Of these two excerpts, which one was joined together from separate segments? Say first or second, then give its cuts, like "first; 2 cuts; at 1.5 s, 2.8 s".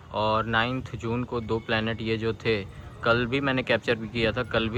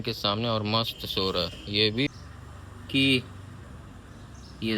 second; 1 cut; at 2.1 s